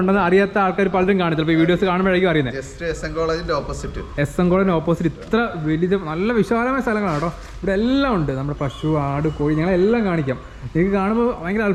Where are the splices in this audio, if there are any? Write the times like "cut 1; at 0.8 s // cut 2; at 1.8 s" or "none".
none